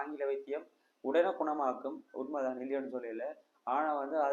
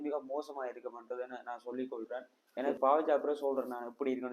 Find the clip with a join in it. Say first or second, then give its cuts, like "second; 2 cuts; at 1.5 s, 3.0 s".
second; 1 cut; at 2.7 s